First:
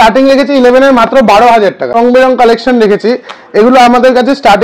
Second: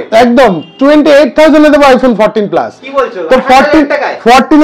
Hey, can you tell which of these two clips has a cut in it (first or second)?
first